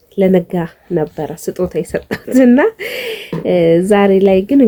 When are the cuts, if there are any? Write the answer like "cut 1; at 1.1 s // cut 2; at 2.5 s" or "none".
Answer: none